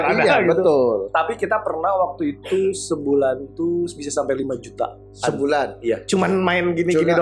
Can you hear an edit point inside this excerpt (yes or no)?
no